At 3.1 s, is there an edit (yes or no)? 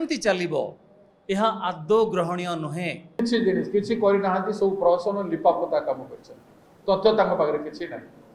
yes